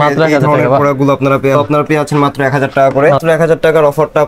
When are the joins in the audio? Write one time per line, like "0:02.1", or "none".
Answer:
0:01.6
0:03.2